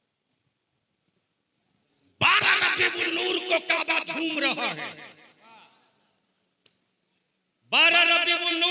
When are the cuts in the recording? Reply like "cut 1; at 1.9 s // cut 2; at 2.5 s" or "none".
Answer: cut 1; at 1.8 s

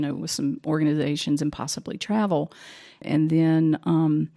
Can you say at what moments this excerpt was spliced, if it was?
cut 1; at 3.0 s

